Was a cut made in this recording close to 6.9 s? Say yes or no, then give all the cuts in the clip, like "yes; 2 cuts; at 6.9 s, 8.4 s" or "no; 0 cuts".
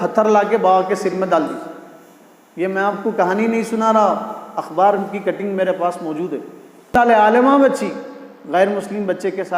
yes; 1 cut; at 6.9 s